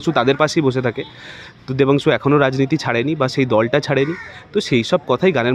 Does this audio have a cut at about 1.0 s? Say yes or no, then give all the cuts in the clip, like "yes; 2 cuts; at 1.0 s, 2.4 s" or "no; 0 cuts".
no; 0 cuts